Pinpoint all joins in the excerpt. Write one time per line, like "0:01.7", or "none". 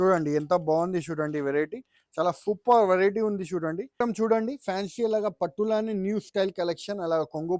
0:04.0